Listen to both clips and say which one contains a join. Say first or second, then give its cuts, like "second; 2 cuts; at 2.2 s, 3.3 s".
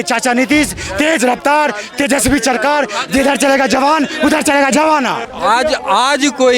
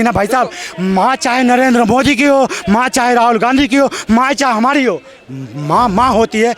first; 1 cut; at 5.3 s